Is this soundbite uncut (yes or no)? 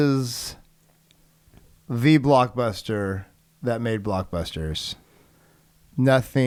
yes